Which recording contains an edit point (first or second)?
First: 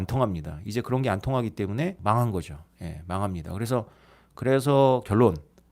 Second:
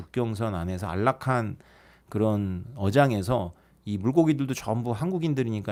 first